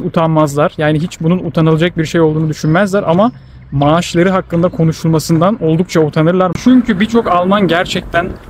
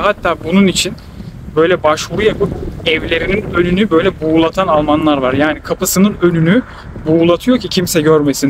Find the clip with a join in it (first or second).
first